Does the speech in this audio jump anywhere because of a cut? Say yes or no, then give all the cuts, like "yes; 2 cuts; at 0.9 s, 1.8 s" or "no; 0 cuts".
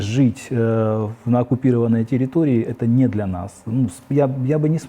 no; 0 cuts